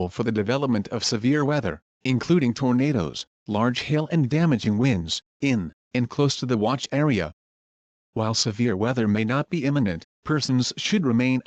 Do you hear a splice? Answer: no; 0 cuts

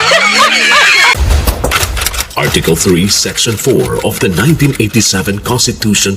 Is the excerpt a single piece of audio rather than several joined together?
no; 1 cut; at 1.2 s

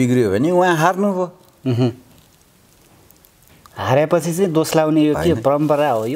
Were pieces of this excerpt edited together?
no; 0 cuts

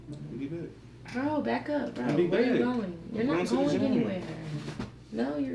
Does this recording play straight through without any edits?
yes; 0 cuts

